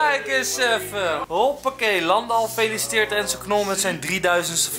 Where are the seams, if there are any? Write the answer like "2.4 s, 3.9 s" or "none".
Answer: 1.2 s